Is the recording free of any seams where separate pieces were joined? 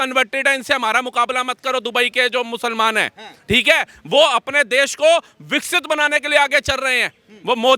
yes; 0 cuts

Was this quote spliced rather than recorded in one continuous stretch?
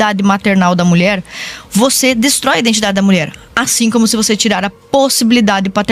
no; 0 cuts

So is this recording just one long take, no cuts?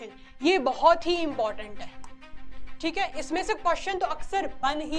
yes; 0 cuts

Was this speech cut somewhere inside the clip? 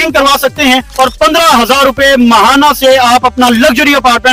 no; 0 cuts

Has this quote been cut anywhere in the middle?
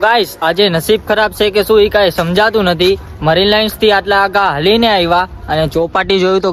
no; 0 cuts

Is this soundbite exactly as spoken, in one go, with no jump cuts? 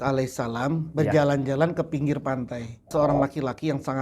no; 1 cut; at 2.9 s

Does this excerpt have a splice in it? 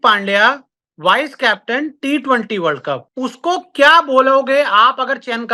yes; 1 cut; at 3.1 s

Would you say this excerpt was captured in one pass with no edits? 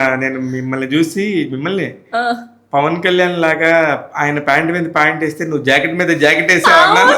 yes; 0 cuts

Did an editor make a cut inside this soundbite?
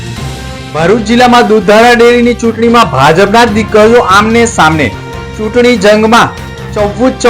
no; 0 cuts

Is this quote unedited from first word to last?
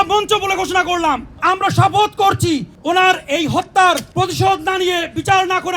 no; 3 cuts; at 1.4 s, 2.7 s, 4.1 s

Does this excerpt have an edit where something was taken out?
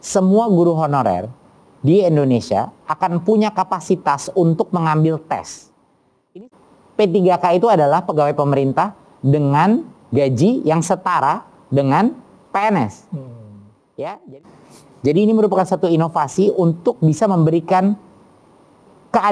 yes; 2 cuts; at 6.5 s, 14.4 s

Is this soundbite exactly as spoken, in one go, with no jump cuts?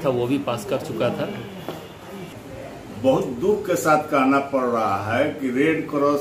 no; 1 cut; at 2.2 s

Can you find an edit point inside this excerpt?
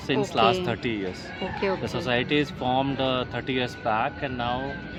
no; 0 cuts

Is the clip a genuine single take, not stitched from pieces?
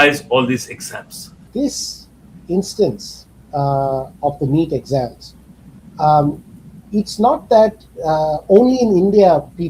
no; 1 cut; at 1.4 s

